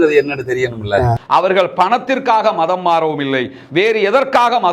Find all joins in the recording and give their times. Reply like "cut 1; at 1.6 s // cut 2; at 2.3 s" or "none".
cut 1; at 1.2 s

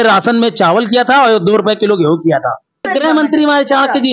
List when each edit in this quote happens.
cut 1; at 2.9 s

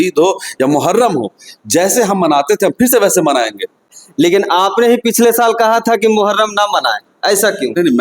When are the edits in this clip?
cut 1; at 3.9 s

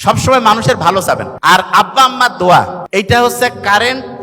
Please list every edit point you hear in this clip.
cut 1; at 1.3 s // cut 2; at 2.8 s

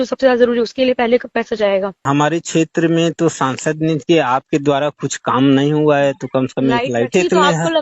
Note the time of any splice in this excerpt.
cut 1; at 2.0 s // cut 2; at 7.1 s

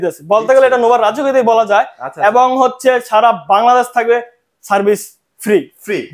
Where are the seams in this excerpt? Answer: none

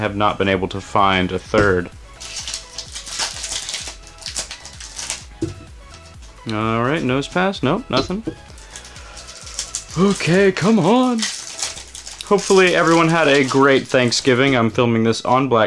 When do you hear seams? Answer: cut 1; at 13.3 s

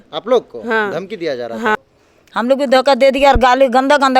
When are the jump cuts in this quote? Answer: cut 1; at 1.8 s

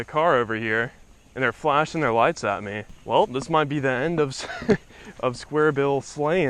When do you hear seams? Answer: cut 1; at 2.9 s

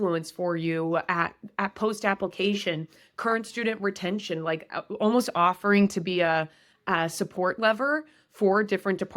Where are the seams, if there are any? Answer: none

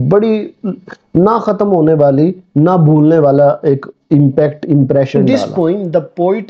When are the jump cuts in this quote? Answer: cut 1; at 5.2 s

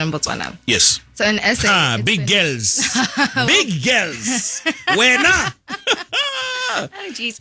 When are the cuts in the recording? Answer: none

